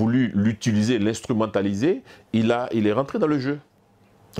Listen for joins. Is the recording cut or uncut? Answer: uncut